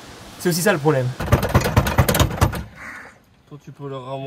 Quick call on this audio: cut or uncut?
cut